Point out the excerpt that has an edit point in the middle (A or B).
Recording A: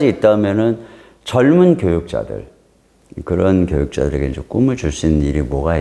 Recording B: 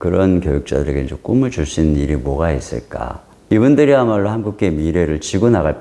B